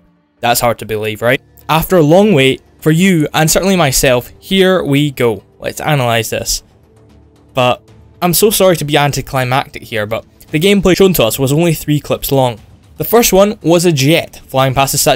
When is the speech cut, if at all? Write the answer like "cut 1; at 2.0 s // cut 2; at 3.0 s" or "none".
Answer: none

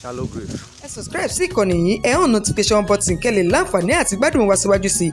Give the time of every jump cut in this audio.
cut 1; at 1.1 s

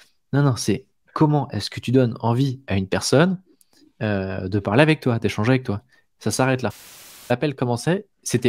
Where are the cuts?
cut 1; at 7.3 s

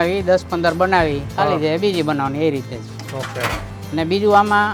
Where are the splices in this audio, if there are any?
none

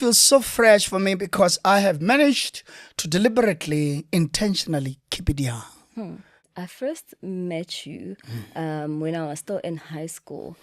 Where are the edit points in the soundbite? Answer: cut 1; at 6.6 s

